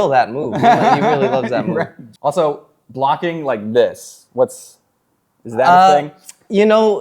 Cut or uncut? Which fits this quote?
cut